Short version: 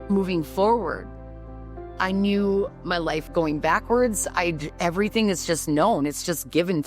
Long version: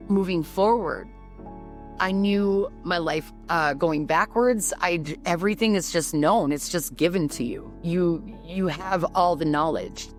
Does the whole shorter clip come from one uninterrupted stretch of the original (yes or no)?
no